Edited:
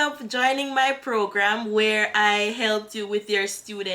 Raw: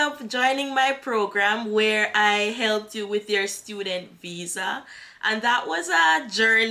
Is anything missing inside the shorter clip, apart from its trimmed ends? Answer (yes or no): no